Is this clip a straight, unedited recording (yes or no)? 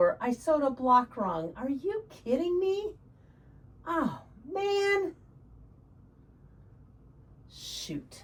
yes